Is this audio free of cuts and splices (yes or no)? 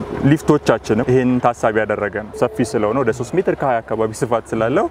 no